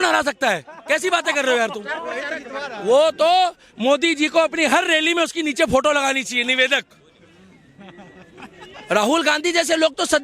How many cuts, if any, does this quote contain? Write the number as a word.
zero